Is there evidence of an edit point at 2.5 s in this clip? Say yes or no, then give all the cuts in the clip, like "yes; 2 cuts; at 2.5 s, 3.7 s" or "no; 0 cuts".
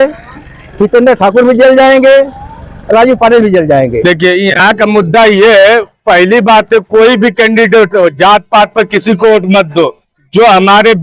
no; 1 cut; at 3.9 s